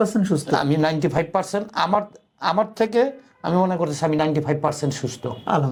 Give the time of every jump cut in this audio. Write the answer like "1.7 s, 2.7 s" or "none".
none